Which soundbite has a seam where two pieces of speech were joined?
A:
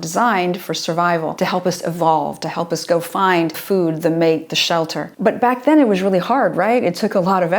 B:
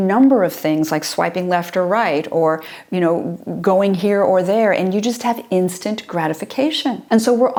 A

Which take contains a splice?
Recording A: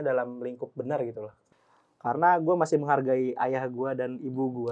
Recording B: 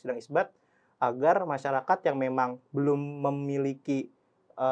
A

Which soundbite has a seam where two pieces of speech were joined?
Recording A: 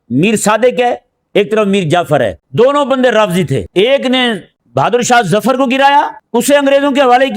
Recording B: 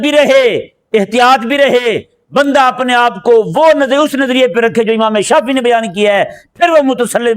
A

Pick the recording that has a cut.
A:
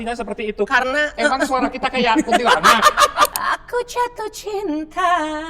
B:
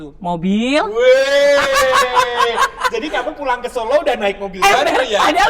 A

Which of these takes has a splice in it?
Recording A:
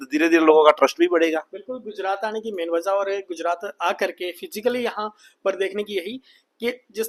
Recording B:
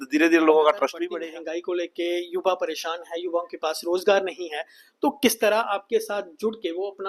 B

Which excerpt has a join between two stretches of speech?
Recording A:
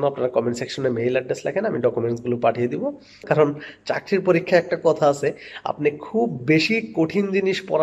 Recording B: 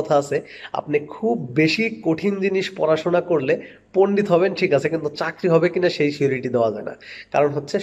A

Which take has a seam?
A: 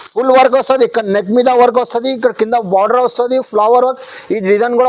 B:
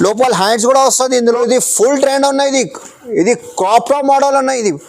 B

